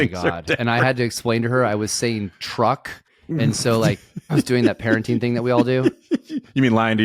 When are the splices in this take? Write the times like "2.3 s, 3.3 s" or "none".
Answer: none